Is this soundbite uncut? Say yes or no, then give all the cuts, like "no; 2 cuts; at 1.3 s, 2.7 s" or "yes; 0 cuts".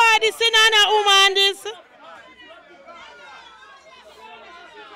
yes; 0 cuts